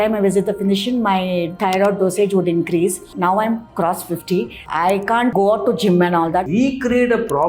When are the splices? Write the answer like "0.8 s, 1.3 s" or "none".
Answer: 1.5 s, 3.1 s, 5.3 s, 6.5 s